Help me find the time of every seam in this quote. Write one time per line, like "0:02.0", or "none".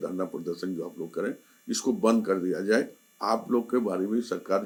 none